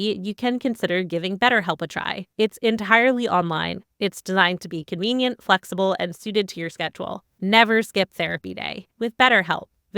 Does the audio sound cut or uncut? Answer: cut